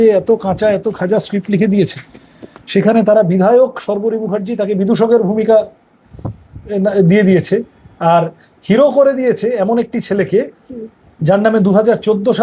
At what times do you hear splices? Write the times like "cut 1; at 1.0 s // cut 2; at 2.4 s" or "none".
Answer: none